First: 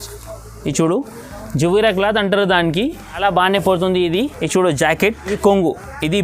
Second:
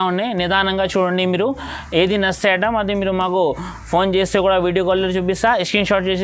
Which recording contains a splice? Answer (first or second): first